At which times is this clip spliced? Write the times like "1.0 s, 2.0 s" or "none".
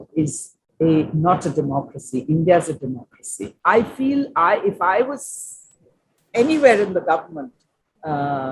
3.5 s

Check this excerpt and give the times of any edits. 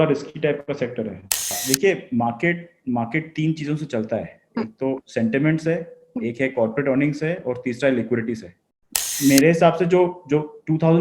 1.6 s, 9.1 s

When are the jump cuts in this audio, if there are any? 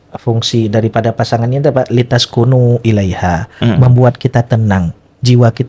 none

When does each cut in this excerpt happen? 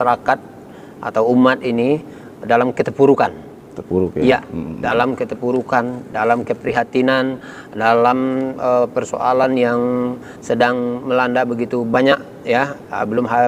none

